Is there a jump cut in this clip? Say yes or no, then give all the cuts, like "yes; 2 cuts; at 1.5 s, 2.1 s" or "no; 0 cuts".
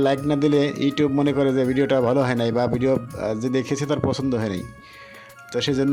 no; 0 cuts